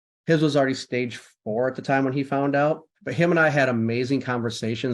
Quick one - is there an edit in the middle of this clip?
yes; 1 cut; at 3.0 s

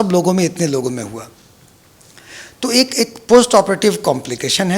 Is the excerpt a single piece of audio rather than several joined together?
yes; 0 cuts

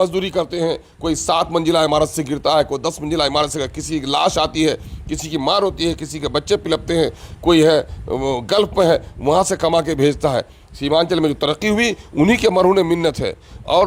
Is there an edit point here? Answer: no; 0 cuts

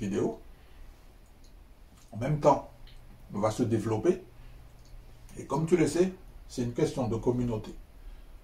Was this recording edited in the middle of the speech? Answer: no; 0 cuts

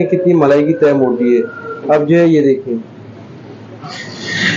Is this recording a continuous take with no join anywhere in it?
yes; 0 cuts

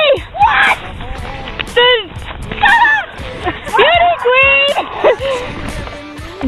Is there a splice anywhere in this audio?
no; 0 cuts

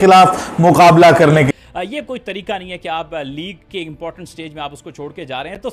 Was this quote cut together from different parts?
yes; 1 cut; at 1.6 s

